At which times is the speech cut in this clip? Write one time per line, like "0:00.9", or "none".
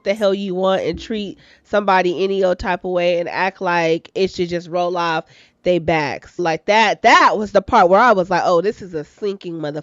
0:06.4